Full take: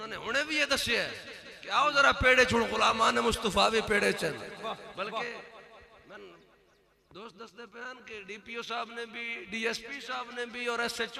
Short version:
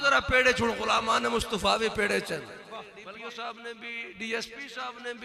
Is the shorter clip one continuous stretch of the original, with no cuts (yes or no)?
no